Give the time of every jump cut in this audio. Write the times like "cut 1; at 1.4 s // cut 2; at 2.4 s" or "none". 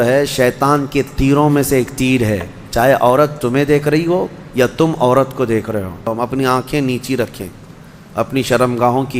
cut 1; at 6.1 s